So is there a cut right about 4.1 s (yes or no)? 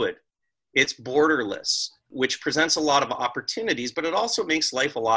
no